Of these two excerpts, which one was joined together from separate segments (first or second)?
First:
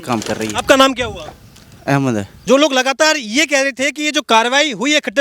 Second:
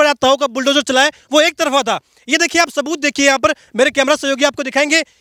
first